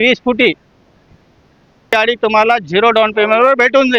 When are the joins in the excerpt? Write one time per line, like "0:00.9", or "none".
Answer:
0:01.9